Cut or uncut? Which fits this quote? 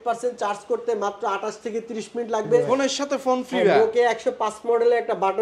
cut